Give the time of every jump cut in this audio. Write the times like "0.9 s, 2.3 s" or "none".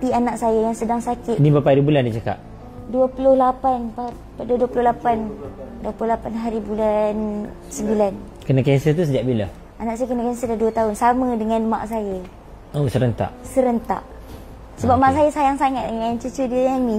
none